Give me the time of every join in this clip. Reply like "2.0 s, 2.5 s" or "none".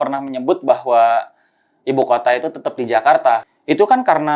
3.4 s